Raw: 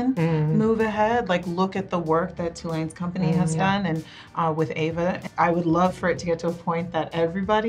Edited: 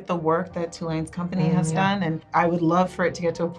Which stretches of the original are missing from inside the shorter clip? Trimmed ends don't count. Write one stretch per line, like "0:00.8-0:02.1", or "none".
0:04.1-0:05.3